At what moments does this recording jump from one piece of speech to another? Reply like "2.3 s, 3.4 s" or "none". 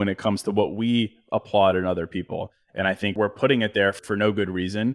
3.1 s, 4.0 s

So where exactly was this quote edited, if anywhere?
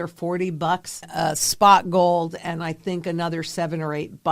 0.9 s

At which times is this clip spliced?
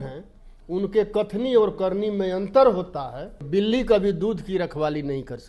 3.4 s

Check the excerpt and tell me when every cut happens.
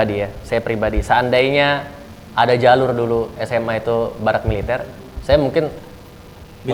none

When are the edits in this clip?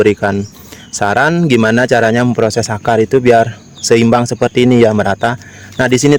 none

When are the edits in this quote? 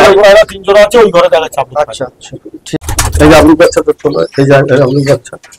2.8 s

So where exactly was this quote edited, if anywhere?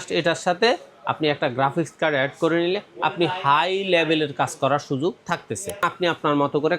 5.8 s

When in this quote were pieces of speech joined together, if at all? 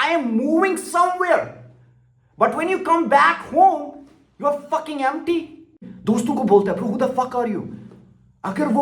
5.9 s

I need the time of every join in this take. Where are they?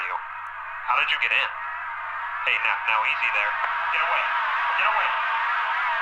none

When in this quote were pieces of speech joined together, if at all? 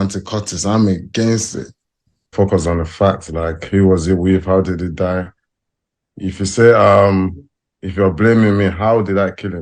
2.3 s

